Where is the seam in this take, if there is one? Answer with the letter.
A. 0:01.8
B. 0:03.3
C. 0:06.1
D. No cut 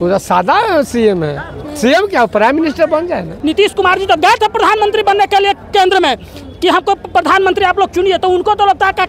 B